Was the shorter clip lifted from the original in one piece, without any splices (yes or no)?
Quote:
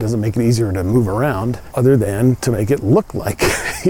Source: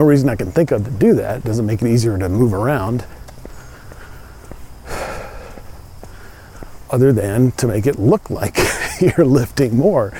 no